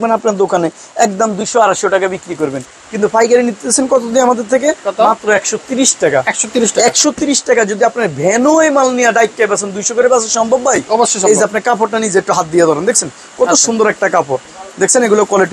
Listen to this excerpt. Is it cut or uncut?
uncut